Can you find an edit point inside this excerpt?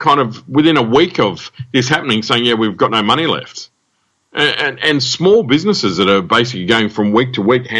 no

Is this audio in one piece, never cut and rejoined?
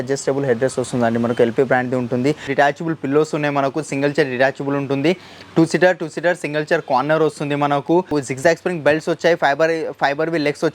no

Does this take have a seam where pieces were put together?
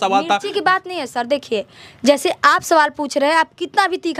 no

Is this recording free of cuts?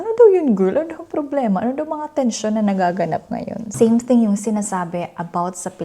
no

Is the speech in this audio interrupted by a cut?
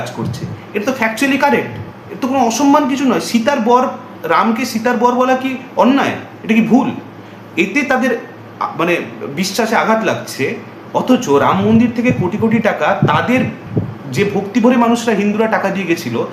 no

